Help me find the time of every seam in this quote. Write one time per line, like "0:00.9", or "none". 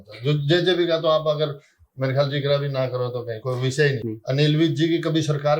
0:04.0